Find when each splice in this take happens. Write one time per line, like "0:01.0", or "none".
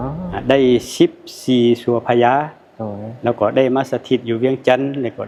none